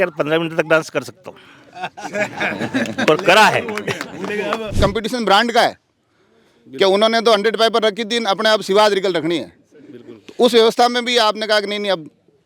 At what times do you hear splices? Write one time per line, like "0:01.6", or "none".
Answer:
0:04.8